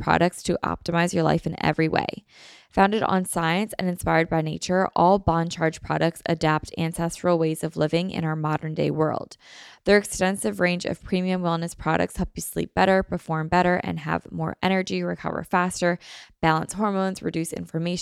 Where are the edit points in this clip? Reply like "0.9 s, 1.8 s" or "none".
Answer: none